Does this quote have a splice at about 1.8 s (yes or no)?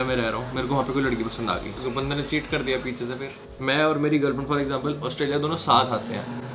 yes